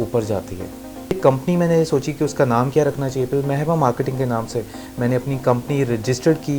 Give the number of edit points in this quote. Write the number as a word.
one